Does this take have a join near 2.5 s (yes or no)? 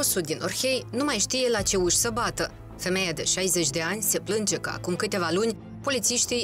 no